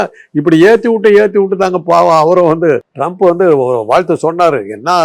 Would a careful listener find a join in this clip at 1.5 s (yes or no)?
no